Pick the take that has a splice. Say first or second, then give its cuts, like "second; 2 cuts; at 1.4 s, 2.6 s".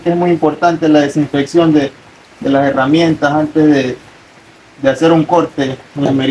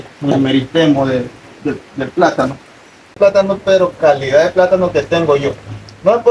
second; 1 cut; at 3.2 s